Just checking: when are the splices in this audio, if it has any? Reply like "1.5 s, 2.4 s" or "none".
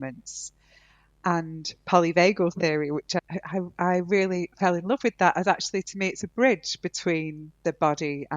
3.2 s